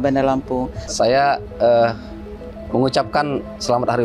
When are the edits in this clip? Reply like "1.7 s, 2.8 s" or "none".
0.9 s